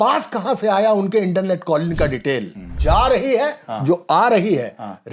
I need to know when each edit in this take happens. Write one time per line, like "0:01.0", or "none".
0:02.7